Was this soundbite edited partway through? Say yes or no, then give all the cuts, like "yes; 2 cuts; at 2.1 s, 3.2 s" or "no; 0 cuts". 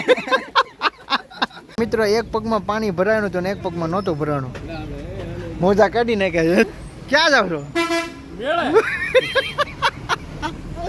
yes; 2 cuts; at 1.8 s, 6.7 s